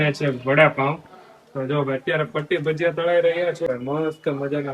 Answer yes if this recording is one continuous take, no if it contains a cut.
no